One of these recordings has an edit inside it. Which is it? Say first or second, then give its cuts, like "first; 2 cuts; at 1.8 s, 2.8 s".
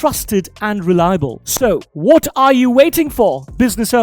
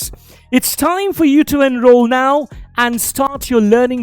first; 1 cut; at 1.3 s